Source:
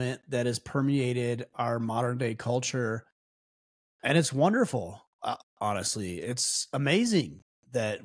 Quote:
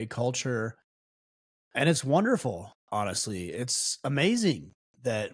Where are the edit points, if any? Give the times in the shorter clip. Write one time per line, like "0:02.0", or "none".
0:02.8